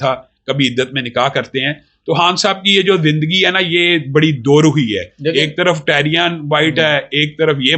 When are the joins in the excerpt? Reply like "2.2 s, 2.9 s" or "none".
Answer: none